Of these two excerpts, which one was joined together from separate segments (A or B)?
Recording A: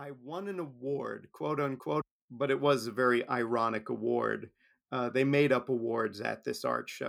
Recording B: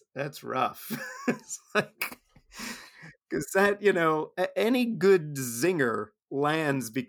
A